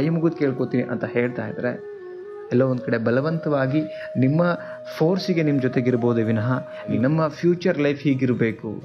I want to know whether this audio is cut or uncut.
cut